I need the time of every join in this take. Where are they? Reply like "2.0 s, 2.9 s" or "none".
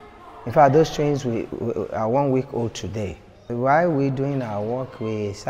3.4 s